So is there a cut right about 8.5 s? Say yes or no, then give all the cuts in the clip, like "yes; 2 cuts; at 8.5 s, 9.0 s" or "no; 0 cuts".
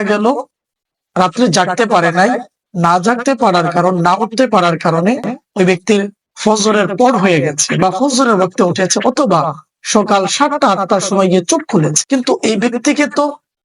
no; 1 cut; at 12.0 s